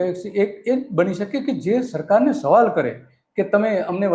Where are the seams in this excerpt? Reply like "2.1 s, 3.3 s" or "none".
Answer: none